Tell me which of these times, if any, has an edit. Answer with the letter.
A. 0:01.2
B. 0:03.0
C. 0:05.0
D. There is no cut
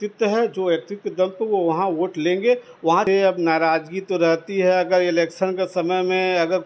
B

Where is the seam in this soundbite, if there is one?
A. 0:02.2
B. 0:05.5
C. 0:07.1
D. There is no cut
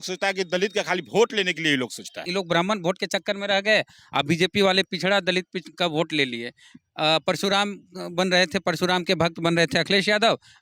A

